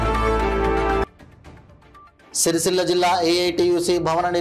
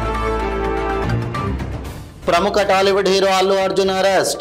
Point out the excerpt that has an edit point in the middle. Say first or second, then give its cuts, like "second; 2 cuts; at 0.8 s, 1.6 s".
second; 1 cut; at 1.0 s